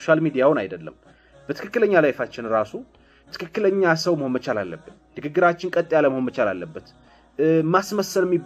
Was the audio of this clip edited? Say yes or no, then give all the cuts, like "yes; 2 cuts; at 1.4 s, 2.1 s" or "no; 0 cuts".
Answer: no; 0 cuts